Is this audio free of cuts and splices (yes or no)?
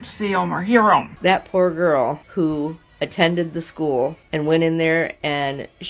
no